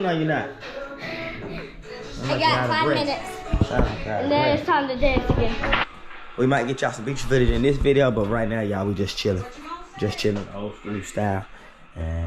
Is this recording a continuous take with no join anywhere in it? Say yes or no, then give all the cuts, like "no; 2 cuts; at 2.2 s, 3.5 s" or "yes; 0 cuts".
no; 1 cut; at 5.9 s